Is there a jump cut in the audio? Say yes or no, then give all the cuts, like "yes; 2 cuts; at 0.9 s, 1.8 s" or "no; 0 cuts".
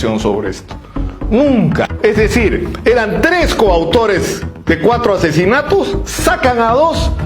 yes; 1 cut; at 1.8 s